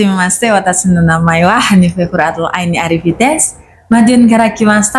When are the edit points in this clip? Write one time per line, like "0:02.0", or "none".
none